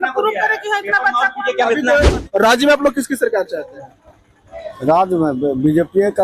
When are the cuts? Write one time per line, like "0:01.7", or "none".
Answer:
0:02.1